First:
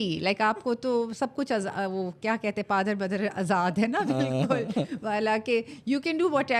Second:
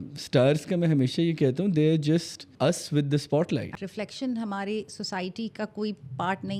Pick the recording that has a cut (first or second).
second